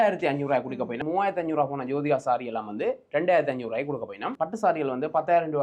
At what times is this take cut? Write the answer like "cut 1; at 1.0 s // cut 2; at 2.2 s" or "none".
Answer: cut 1; at 1.0 s // cut 2; at 4.2 s